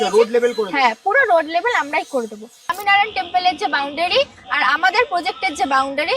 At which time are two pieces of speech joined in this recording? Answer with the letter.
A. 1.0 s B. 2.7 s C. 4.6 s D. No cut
B